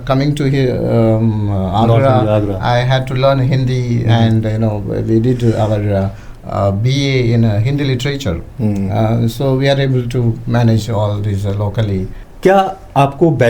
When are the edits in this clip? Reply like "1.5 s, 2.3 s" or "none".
12.1 s